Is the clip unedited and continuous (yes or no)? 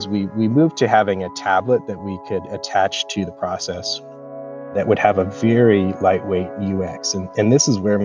yes